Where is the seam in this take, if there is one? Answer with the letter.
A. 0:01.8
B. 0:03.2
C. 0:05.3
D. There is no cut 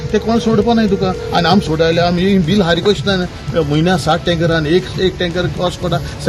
D